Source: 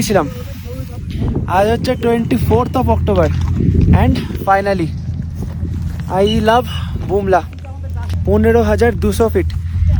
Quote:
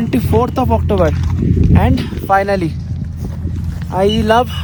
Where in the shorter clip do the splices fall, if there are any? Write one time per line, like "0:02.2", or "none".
none